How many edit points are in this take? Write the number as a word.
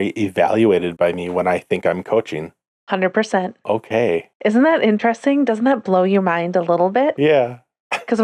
zero